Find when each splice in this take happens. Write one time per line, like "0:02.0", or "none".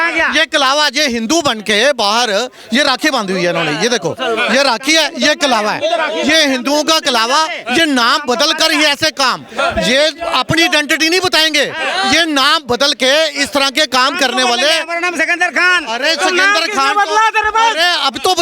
none